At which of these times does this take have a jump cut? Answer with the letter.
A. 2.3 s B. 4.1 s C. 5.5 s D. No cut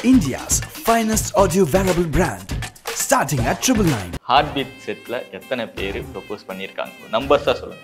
B